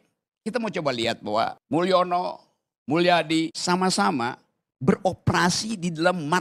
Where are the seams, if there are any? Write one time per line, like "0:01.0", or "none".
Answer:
0:01.6
0:03.6

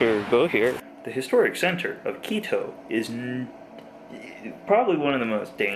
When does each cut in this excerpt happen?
0:00.9

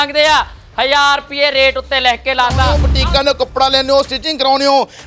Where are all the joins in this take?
0:02.7

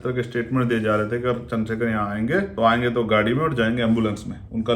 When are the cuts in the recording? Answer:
0:02.5

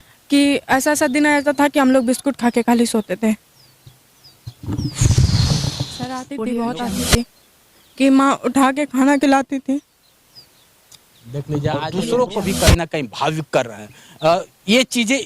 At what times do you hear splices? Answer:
0:06.2
0:11.9

